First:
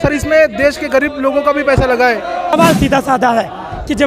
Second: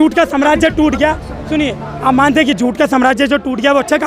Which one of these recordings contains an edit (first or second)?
first